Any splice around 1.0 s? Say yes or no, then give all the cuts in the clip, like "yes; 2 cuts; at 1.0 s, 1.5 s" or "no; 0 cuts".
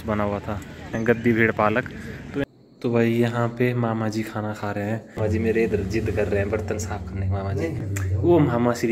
yes; 4 cuts; at 1.0 s, 2.4 s, 5.2 s, 7.8 s